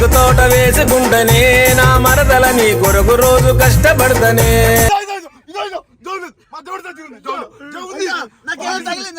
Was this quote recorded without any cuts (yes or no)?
no